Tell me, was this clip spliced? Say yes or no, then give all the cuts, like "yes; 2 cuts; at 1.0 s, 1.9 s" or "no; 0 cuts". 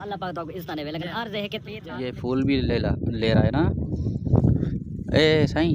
yes; 1 cut; at 2.2 s